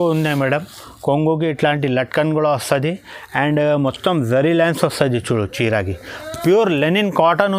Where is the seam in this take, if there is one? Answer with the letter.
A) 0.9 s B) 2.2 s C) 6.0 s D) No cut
D